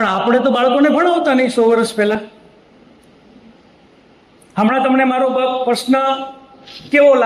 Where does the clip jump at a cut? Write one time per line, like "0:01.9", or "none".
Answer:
none